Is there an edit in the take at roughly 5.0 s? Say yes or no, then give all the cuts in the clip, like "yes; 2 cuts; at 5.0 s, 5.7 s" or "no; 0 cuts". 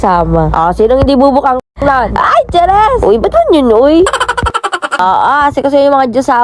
yes; 1 cut; at 5.0 s